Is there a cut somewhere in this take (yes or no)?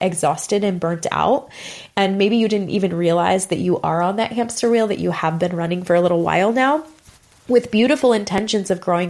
no